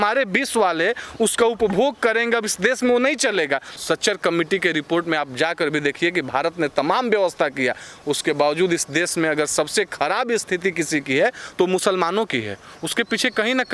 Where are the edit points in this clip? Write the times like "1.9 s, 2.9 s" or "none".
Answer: 3.7 s